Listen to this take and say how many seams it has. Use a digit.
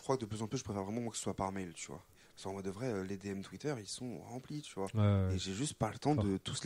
1